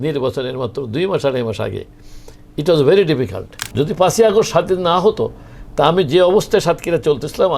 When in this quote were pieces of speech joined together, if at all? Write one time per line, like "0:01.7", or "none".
0:03.6